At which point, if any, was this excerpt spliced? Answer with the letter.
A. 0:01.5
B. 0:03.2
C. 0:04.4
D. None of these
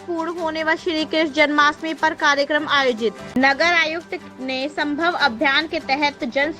B